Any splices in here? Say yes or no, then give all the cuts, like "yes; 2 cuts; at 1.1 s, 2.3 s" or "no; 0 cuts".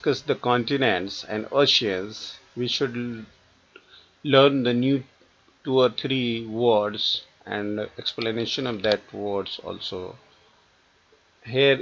no; 0 cuts